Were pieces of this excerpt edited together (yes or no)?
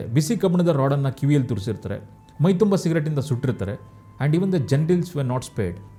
no